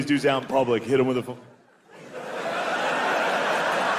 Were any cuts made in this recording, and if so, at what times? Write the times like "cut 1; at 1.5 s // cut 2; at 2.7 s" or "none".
none